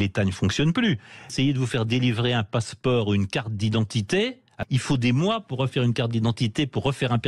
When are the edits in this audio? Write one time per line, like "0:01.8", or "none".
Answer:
0:01.3
0:04.5